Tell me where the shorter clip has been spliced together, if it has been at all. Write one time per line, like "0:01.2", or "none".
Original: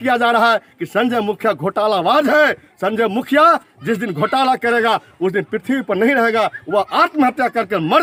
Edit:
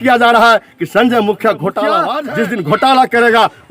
0:02.1